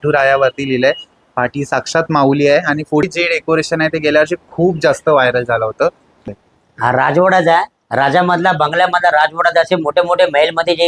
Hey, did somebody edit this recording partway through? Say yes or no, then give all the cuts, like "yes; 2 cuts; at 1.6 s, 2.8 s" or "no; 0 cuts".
yes; 2 cuts; at 3.0 s, 6.2 s